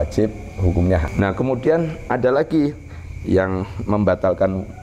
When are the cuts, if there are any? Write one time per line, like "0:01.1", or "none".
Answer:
0:01.1